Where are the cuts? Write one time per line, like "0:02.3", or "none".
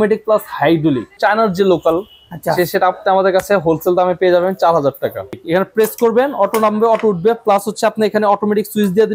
0:01.2
0:05.4